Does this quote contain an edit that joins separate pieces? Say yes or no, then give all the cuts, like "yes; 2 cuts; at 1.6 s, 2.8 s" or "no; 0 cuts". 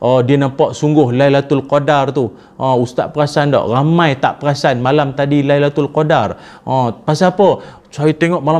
no; 0 cuts